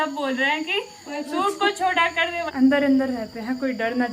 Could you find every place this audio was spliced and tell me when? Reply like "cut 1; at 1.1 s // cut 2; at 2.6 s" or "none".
cut 1; at 2.5 s